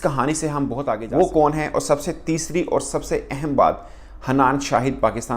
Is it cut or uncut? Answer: cut